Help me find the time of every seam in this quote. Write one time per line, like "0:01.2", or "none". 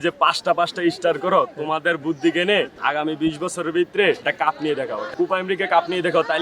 0:02.7
0:04.2